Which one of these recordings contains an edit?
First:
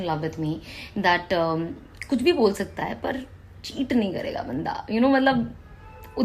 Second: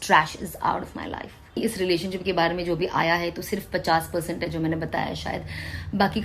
second; 1 cut; at 1.6 s

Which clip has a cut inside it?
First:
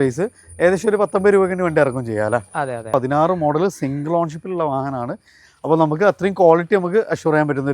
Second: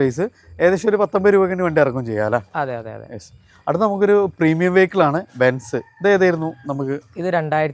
first; 1 cut; at 2.9 s

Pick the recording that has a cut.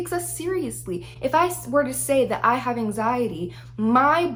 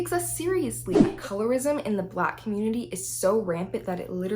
second; 1 cut; at 1.1 s

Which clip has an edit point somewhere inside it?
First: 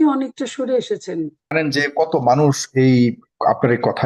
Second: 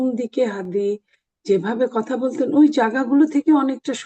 first; 1 cut; at 1.5 s

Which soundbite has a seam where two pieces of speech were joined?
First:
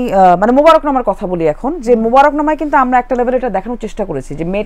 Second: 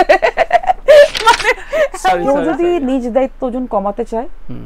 second; 1 cut; at 2.2 s

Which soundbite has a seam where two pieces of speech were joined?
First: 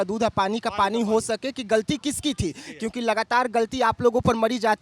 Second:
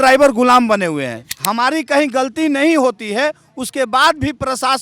second; 1 cut; at 1.2 s

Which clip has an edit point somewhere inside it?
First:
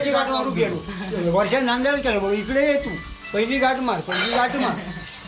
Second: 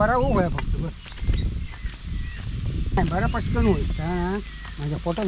second; 1 cut; at 3.0 s

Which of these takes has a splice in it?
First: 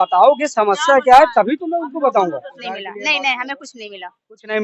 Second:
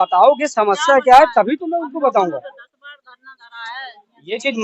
first; 1 cut; at 2.6 s

